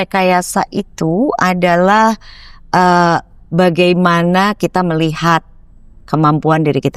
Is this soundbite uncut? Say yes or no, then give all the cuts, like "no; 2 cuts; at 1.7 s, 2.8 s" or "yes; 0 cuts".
yes; 0 cuts